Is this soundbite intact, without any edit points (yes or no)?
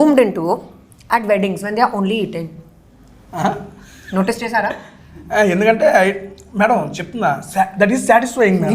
yes